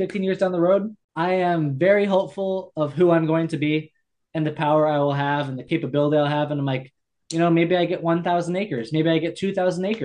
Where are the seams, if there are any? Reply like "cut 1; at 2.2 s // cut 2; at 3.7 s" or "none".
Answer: cut 1; at 1.0 s